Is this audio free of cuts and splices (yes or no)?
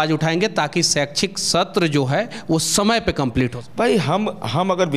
no